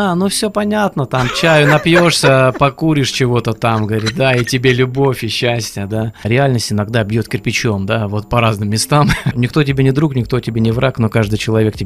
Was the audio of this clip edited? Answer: yes; 2 cuts; at 6.2 s, 9.3 s

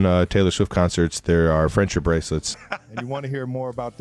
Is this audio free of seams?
no; 1 cut; at 2.6 s

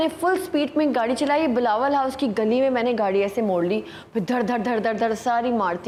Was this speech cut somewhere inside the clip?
no; 0 cuts

